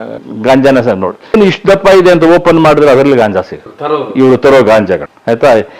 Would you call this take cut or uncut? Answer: cut